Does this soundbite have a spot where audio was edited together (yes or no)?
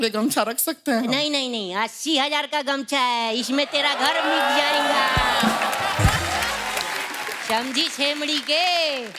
no